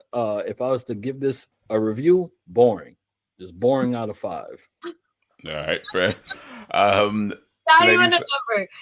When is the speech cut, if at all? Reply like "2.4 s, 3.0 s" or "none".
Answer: 1.5 s